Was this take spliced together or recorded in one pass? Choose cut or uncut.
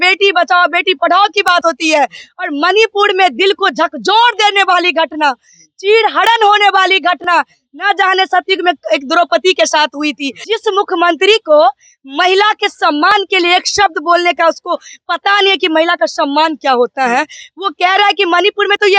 cut